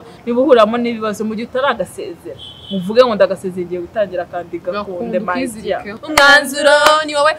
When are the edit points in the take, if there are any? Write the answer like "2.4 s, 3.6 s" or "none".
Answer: 5.9 s